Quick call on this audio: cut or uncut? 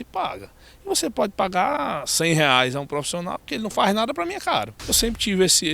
cut